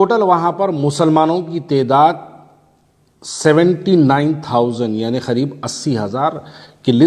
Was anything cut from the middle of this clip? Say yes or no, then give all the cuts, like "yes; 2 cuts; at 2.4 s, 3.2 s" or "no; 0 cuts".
no; 0 cuts